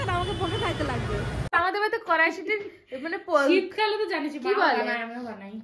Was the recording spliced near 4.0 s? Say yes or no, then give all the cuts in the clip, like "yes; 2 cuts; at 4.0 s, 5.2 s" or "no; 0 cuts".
no; 1 cut; at 1.5 s